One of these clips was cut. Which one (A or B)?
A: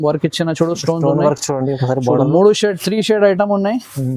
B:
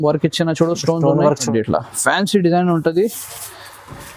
B